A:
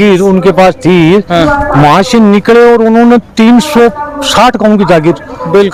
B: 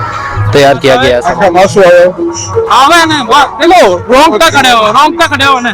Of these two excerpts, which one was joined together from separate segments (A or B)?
B